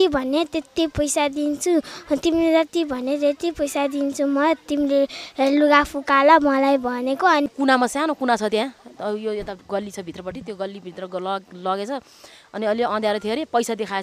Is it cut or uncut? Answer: cut